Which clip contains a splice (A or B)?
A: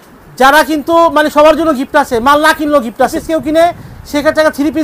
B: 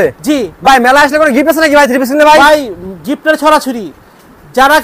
A